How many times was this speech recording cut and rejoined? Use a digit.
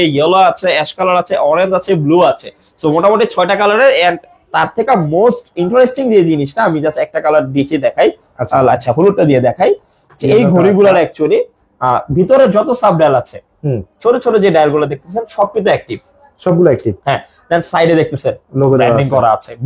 0